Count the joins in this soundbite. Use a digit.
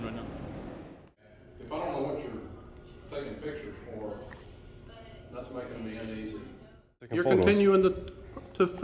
2